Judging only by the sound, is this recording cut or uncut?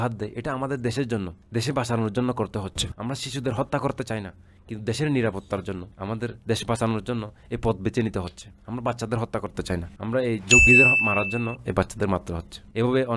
uncut